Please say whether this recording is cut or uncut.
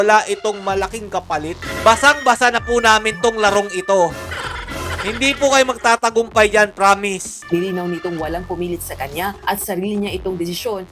cut